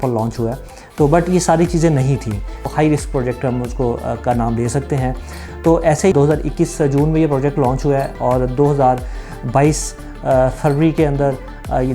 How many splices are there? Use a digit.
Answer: 2